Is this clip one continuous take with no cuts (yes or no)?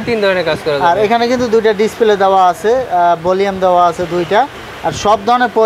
yes